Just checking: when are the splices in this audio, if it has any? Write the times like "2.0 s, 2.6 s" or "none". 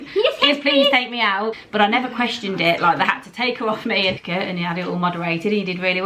1.6 s, 4.2 s